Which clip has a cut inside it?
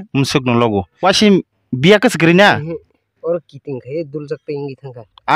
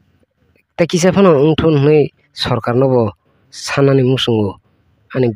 first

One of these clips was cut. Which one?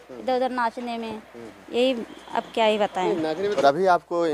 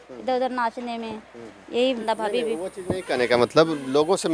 second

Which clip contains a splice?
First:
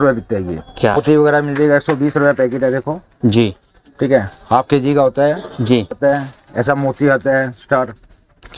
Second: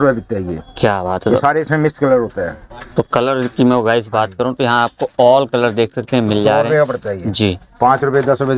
first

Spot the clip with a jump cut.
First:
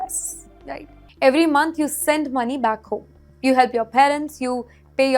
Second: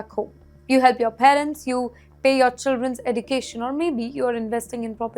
first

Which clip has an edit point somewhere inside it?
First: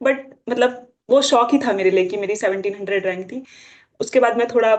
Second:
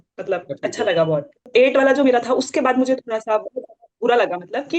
second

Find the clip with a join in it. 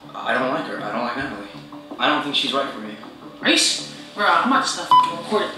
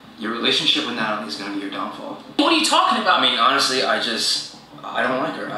first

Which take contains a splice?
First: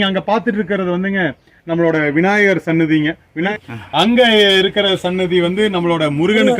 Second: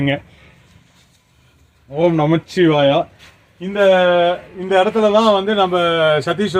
first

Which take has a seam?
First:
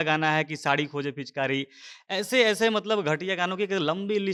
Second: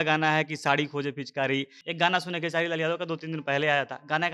second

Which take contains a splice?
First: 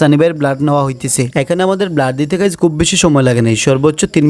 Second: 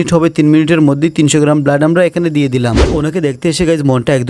second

